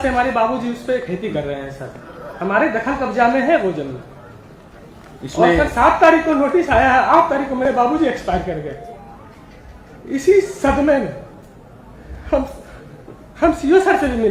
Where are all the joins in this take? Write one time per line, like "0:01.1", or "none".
none